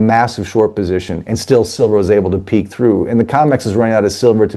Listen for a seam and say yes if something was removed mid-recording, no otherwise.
no